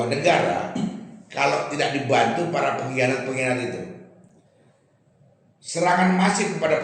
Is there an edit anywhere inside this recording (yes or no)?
no